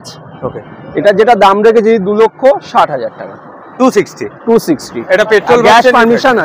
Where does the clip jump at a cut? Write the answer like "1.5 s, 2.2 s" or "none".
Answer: none